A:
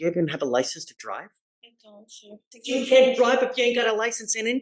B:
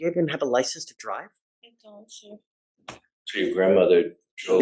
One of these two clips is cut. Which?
A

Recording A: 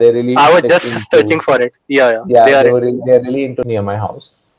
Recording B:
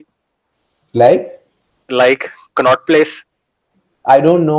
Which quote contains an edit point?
A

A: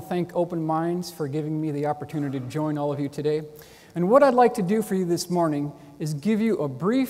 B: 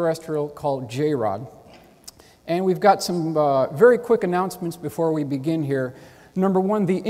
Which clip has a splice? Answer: B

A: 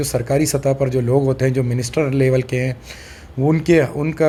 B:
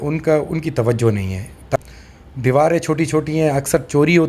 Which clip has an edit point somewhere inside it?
B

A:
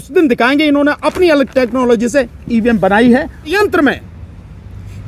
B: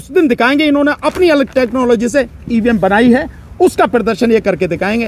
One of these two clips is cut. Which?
A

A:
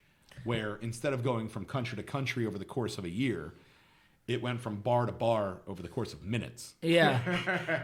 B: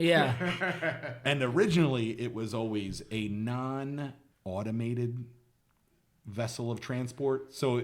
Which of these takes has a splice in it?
B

